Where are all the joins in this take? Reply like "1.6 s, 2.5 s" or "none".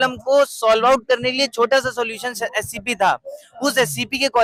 none